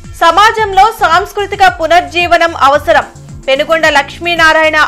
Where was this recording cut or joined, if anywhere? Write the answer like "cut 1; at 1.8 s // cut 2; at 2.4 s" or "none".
none